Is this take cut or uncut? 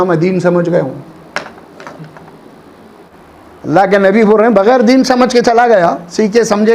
cut